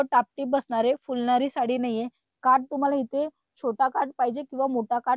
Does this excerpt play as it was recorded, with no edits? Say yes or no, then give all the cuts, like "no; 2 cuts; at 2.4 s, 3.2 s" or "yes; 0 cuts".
yes; 0 cuts